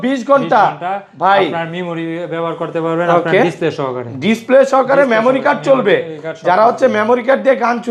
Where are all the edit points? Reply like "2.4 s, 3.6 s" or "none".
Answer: none